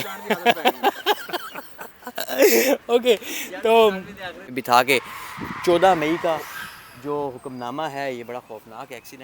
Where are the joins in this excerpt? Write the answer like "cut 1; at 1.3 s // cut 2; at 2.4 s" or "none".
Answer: cut 1; at 4.5 s